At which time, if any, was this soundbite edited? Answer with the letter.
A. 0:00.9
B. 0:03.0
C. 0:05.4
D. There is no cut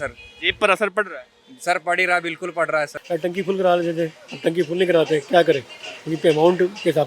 B